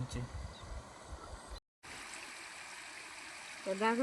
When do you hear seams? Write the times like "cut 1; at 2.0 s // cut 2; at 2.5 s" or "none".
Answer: cut 1; at 1.7 s